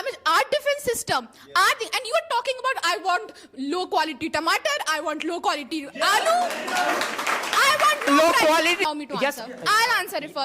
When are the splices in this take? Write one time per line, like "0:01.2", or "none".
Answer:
0:08.8